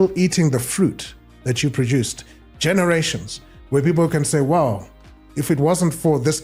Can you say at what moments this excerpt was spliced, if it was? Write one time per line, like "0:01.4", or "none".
none